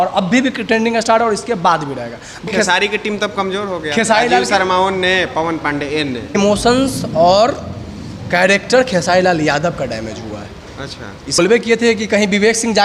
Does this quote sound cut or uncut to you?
cut